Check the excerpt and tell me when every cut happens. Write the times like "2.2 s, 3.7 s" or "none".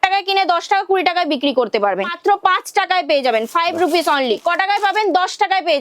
2.1 s, 4.4 s